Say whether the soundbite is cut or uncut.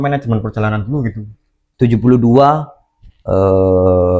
cut